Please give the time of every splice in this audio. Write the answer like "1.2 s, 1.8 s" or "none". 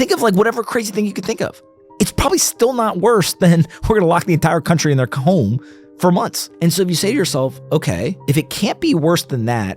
6.4 s, 8.2 s

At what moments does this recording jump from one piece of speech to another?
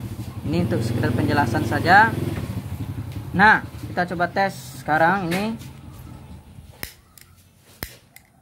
none

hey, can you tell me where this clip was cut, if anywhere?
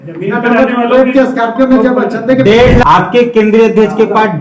2.8 s

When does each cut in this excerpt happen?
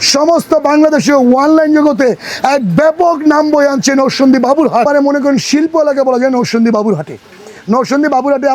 4.9 s

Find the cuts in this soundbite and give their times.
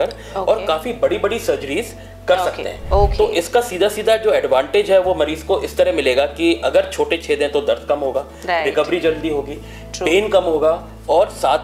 none

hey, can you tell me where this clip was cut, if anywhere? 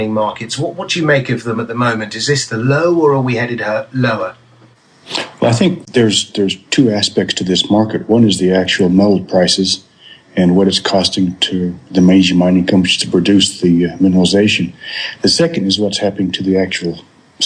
13.8 s

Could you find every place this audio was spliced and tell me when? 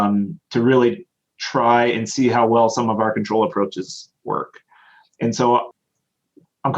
5.8 s

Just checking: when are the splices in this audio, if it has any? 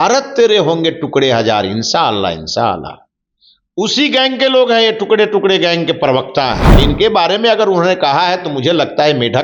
6.7 s

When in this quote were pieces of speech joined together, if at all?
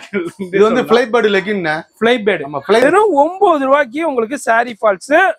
2.8 s

